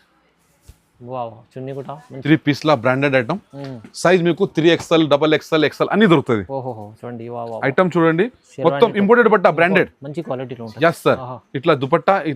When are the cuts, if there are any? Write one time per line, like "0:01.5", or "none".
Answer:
0:02.0